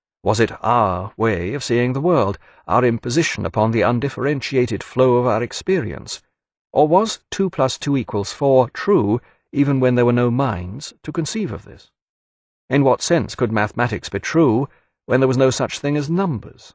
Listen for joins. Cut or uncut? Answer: cut